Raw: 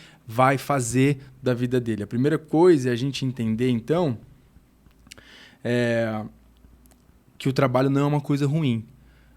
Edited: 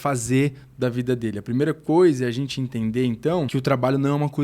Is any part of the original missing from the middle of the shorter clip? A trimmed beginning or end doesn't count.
yes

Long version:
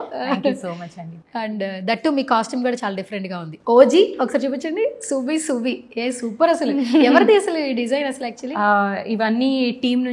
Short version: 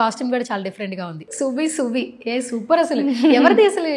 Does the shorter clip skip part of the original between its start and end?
yes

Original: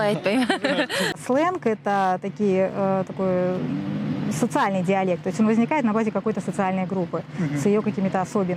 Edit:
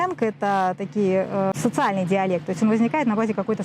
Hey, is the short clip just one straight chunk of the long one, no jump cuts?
no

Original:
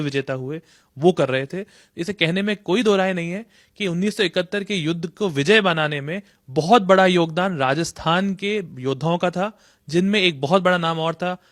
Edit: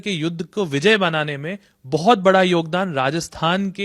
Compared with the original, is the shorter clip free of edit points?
yes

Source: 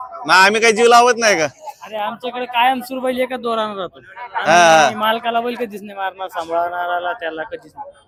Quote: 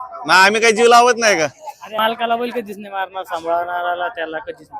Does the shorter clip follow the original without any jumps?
no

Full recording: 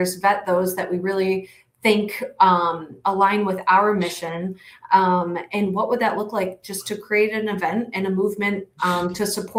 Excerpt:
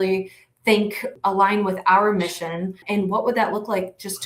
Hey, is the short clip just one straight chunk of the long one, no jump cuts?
no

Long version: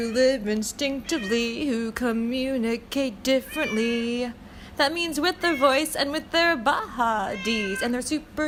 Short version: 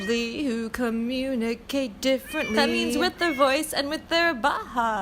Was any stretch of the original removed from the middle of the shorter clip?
yes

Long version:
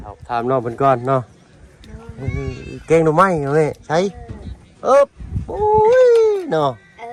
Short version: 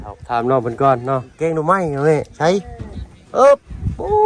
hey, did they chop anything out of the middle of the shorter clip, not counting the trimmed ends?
yes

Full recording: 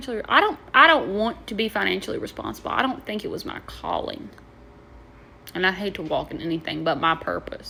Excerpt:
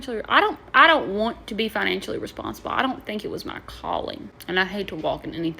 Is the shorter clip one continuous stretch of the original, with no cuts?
no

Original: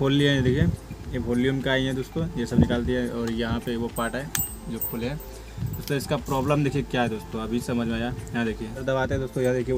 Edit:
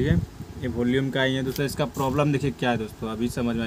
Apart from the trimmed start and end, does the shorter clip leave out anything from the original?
yes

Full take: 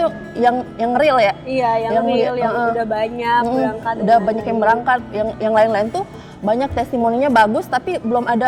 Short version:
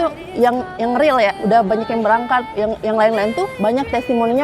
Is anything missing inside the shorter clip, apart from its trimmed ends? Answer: yes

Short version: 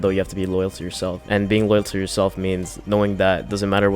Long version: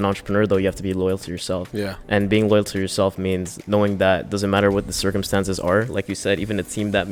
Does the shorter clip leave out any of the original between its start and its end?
yes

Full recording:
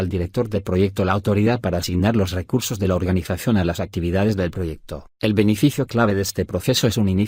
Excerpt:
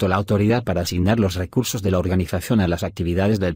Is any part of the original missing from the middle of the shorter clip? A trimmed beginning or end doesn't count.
no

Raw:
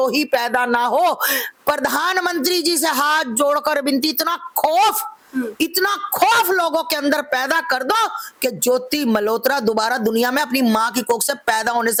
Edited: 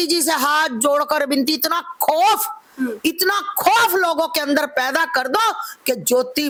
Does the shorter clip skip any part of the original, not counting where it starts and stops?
no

